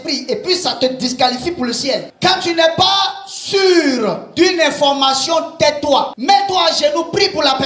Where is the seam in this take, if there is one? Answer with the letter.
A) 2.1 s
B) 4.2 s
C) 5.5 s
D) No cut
A